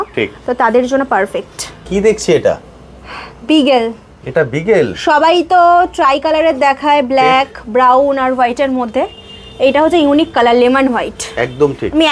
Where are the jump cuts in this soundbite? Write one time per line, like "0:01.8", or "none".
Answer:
0:01.8

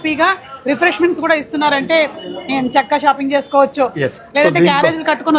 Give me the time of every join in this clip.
none

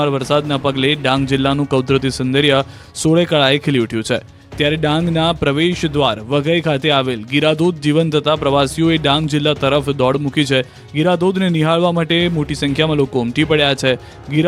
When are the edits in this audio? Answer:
none

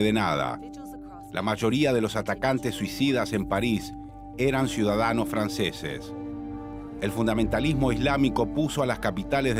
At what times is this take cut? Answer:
none

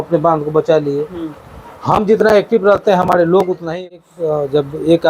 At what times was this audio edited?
0:03.7

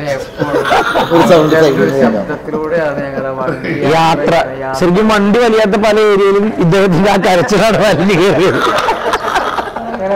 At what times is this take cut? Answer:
none

